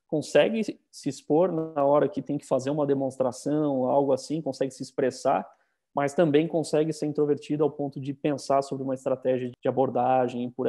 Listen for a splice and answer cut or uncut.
cut